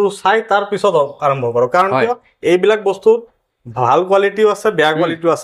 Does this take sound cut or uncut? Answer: uncut